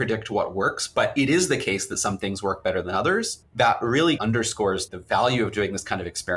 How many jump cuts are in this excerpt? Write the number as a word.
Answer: two